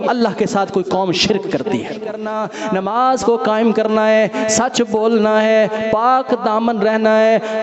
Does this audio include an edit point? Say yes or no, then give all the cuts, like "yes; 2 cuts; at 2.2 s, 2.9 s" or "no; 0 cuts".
yes; 1 cut; at 2.3 s